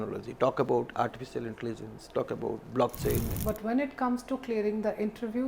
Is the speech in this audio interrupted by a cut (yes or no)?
yes